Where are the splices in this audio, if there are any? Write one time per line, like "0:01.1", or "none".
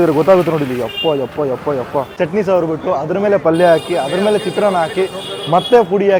0:02.1